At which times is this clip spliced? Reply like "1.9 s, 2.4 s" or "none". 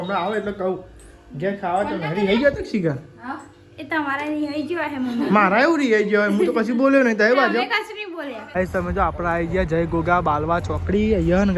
8.5 s